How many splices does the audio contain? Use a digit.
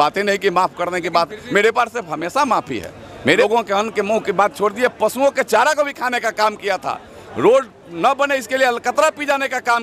1